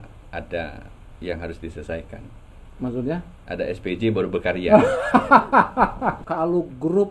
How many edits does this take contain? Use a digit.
1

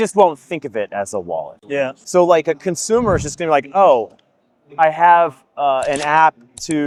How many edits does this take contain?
0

